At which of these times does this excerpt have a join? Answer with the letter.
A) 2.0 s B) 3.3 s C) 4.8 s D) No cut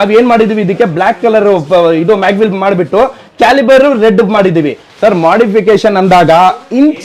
C